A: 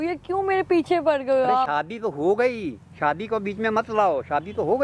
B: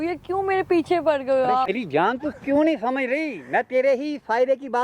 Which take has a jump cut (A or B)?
B